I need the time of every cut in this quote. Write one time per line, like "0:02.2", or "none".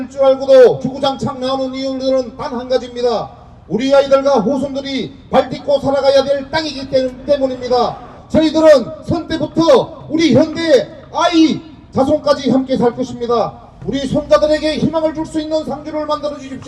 0:08.1